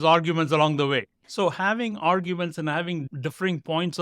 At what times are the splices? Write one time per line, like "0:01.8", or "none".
0:01.2
0:03.1